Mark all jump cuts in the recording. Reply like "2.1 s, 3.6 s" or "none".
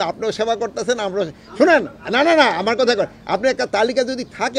none